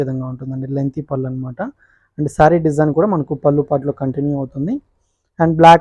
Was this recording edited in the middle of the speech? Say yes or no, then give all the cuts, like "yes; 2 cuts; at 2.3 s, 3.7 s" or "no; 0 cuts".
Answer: no; 0 cuts